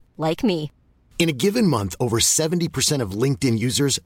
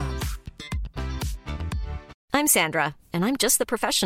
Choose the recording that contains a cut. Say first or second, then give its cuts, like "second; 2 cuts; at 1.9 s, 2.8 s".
second; 1 cut; at 2.1 s